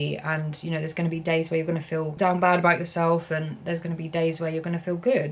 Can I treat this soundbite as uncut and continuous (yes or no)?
no